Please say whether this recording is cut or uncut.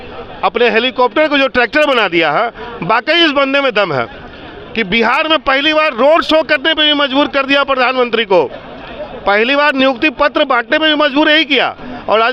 uncut